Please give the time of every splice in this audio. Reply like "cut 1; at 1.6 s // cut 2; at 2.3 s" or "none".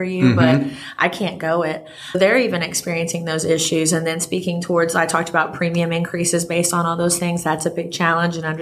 cut 1; at 2.1 s